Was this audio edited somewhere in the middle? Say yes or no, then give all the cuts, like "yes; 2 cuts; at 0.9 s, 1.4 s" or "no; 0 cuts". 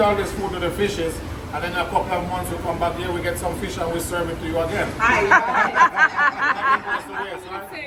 no; 0 cuts